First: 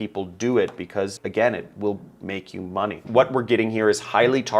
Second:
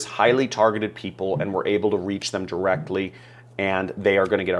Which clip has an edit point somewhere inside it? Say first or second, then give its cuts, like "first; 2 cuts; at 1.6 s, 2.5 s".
first; 1 cut; at 3.0 s